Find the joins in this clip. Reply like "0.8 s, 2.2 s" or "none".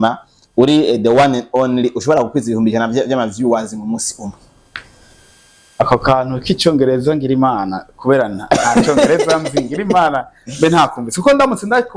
none